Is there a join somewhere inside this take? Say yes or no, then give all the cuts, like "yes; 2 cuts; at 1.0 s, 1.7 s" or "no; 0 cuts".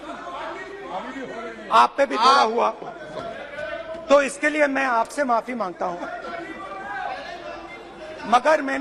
no; 0 cuts